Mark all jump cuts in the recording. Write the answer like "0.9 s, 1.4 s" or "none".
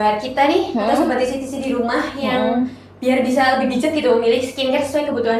none